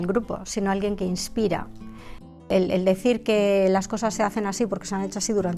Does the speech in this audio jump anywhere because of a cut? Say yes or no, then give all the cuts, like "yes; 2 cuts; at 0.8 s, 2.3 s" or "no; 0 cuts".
yes; 1 cut; at 2.5 s